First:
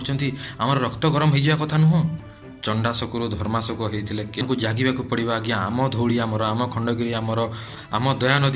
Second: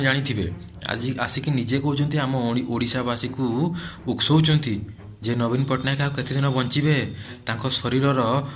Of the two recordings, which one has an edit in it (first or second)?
first